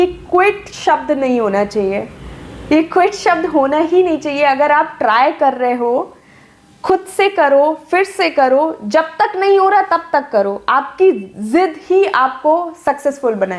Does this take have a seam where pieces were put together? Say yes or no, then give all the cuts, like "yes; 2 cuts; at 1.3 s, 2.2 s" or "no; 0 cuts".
no; 0 cuts